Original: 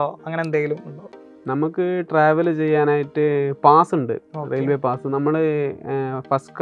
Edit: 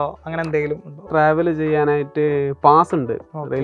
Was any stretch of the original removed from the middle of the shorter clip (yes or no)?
yes